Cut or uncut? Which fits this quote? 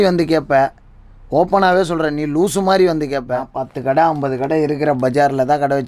cut